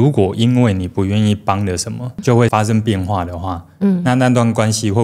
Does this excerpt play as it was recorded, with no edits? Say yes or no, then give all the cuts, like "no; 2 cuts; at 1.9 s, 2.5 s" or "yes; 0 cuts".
yes; 0 cuts